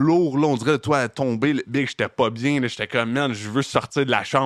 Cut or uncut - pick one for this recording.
uncut